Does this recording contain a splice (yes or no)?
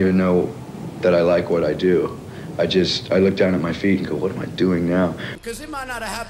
yes